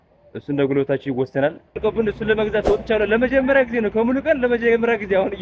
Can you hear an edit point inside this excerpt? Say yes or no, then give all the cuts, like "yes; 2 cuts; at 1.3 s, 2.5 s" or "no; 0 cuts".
yes; 1 cut; at 1.8 s